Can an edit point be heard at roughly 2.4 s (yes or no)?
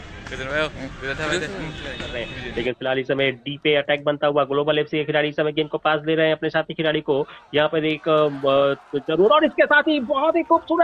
yes